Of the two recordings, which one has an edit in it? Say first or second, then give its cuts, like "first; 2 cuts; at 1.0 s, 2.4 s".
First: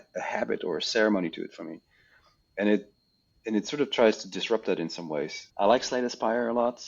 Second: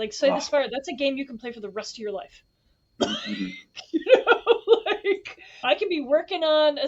first; 1 cut; at 5.4 s